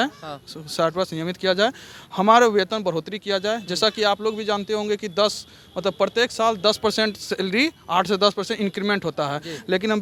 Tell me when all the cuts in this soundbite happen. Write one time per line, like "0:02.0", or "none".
none